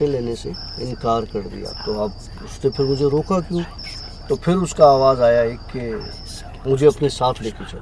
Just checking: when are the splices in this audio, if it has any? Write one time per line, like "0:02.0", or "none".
0:01.7
0:03.7